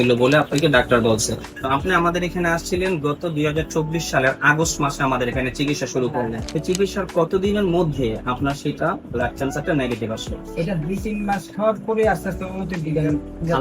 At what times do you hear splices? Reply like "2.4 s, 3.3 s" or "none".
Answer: 1.5 s, 6.4 s